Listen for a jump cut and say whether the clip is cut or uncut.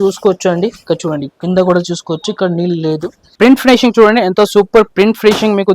cut